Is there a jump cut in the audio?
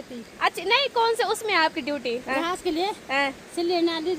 yes; 1 cut; at 2.2 s

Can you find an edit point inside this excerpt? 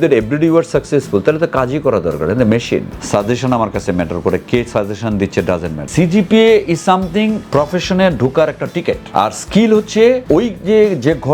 yes; 5 cuts; at 3.0 s, 5.8 s, 7.4 s, 9.0 s, 10.2 s

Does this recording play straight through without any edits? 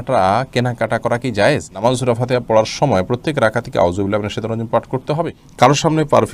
no; 2 cuts; at 1.8 s, 5.4 s

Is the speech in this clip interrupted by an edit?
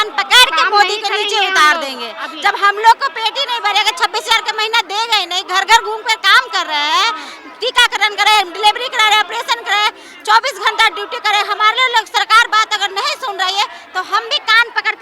no; 0 cuts

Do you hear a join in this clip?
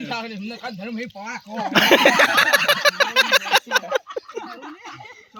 no; 0 cuts

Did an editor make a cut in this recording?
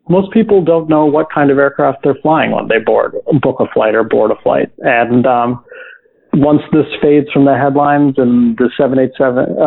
no; 0 cuts

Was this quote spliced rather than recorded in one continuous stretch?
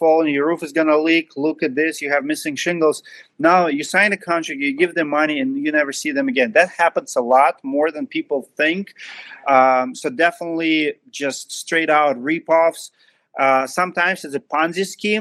no; 0 cuts

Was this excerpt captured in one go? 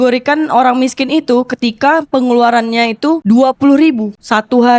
no; 1 cut; at 3.2 s

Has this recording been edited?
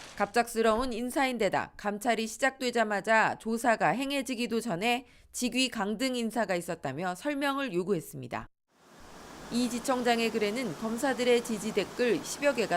yes; 1 cut; at 10.2 s

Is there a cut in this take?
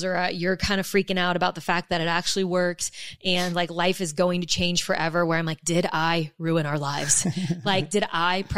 no; 0 cuts

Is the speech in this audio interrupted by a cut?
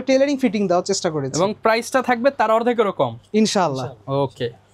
no; 0 cuts

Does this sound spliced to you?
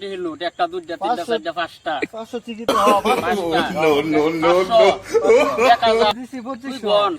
yes; 1 cut; at 6.1 s

